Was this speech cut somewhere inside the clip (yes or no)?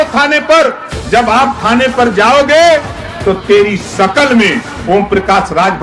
yes